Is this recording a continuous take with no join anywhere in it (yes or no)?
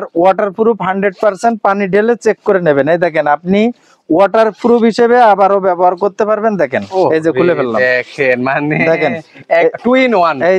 yes